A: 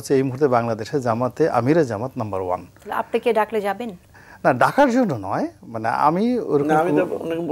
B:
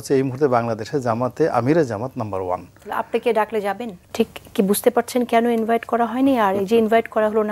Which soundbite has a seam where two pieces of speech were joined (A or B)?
B